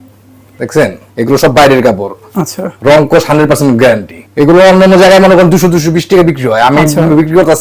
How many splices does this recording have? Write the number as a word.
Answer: two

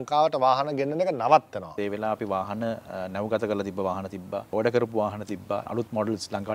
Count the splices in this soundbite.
three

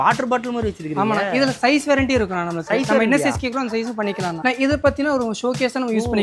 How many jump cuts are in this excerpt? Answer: one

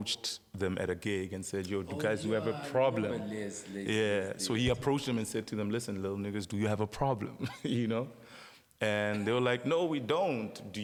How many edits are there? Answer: zero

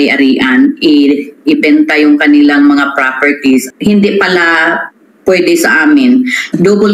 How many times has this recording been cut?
one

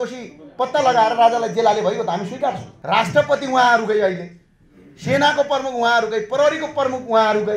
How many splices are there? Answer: one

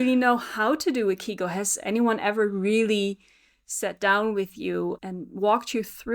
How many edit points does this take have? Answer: one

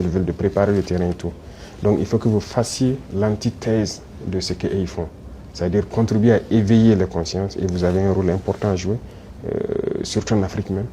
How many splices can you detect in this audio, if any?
one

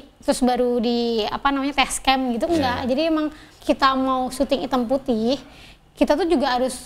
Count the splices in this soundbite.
one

